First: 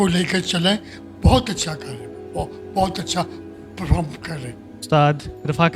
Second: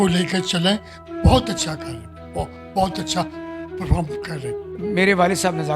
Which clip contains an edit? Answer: second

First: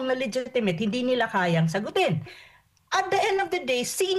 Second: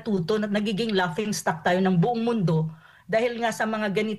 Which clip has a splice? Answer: first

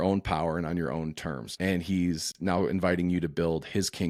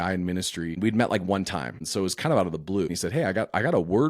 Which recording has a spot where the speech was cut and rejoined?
second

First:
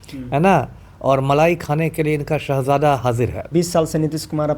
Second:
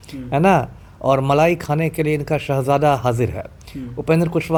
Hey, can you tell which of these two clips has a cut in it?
first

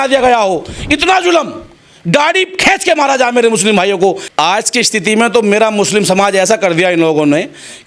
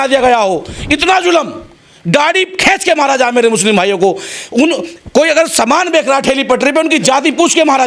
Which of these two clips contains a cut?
first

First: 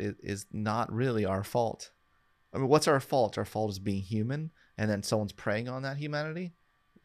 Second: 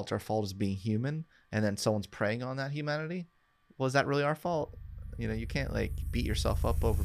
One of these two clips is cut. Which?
first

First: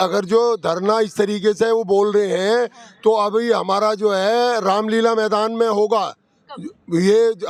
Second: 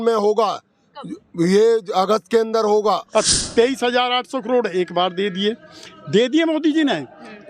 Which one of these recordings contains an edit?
second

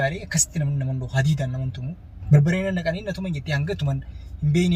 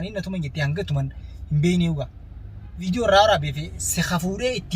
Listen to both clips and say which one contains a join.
second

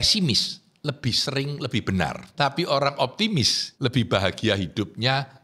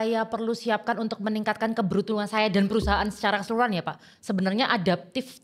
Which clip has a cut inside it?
first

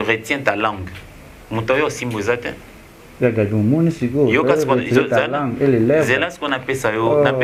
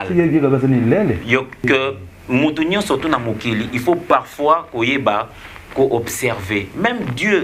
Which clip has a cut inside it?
second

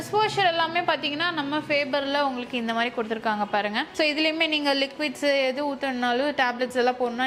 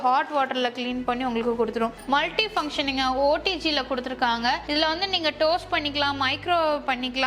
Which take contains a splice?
second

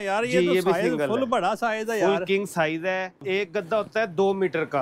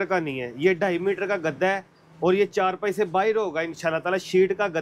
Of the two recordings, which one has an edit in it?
first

